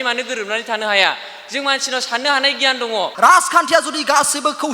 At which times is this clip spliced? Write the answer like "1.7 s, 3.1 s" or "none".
3.1 s